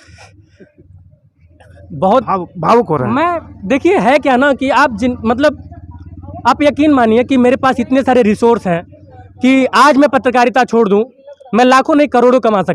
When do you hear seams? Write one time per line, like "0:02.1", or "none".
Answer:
none